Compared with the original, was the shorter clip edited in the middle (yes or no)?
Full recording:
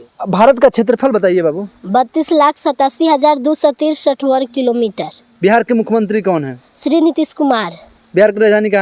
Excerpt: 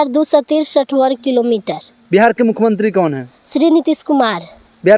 no